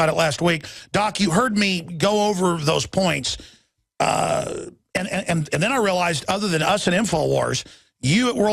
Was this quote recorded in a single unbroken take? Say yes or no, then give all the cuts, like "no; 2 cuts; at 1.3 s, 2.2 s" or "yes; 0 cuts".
no; 1 cut; at 7.1 s